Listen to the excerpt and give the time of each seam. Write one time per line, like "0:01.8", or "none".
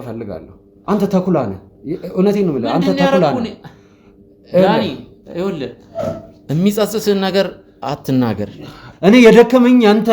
0:08.8